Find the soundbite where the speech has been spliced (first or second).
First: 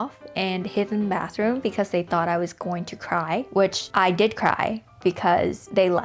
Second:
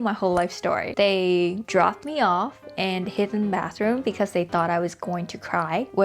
second